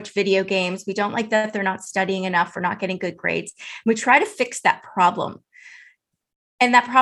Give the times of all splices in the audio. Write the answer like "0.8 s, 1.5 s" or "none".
none